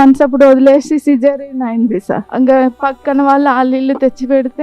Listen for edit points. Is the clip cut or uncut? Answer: cut